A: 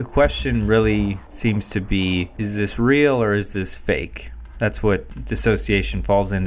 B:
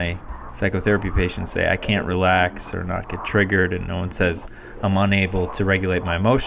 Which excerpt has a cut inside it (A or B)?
A